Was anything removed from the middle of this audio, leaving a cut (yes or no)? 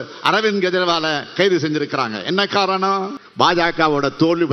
yes